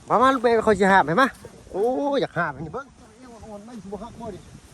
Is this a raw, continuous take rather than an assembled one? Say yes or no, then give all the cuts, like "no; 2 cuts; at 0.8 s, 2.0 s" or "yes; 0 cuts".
no; 1 cut; at 2.7 s